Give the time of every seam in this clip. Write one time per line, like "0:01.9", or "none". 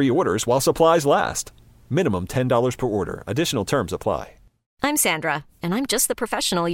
0:04.8